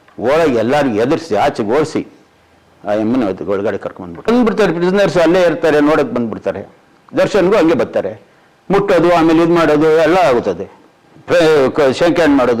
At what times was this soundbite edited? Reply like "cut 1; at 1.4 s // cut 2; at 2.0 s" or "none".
cut 1; at 4.3 s